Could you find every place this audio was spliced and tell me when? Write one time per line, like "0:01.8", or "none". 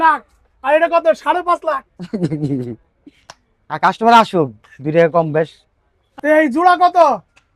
0:06.2